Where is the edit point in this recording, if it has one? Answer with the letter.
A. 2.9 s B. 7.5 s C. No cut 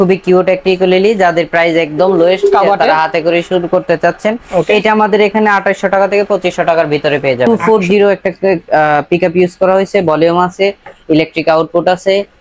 B